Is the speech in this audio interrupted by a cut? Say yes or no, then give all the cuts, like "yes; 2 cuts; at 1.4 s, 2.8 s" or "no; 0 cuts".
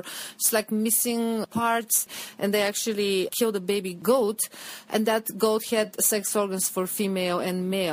yes; 1 cut; at 2.2 s